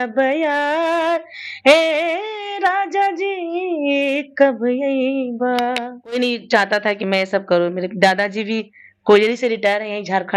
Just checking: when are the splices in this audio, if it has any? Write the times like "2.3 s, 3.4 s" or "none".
6.2 s